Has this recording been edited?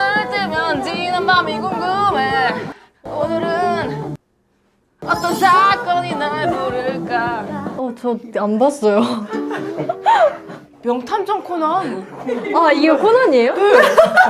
no; 0 cuts

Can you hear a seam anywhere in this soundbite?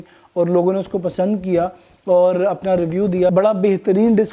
yes; 1 cut; at 3.3 s

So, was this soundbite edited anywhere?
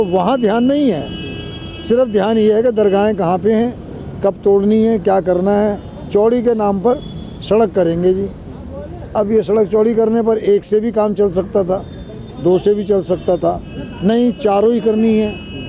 no; 0 cuts

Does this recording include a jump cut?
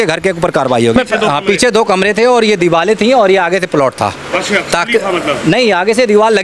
yes; 1 cut; at 0.9 s

